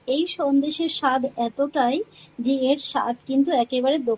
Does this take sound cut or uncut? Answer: uncut